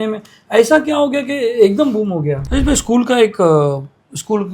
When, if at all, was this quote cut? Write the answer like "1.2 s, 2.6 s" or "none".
2.4 s